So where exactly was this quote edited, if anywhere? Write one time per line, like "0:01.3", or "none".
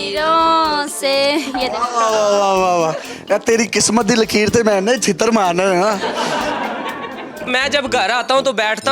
0:07.5